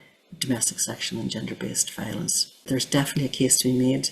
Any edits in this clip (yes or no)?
yes